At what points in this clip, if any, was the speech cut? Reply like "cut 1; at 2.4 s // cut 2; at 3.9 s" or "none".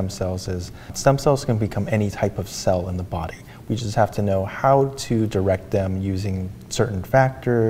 cut 1; at 0.9 s